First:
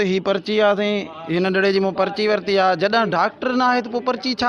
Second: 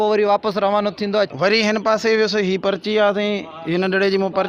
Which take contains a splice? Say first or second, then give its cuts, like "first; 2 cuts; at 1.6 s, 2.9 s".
second; 1 cut; at 1.3 s